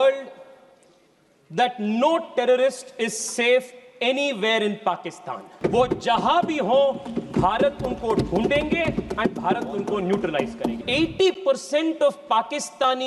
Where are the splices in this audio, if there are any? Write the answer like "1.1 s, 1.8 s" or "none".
5.5 s, 10.8 s